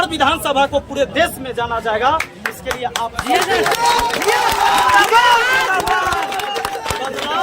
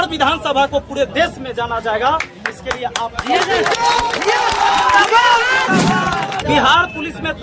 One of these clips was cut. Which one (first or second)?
second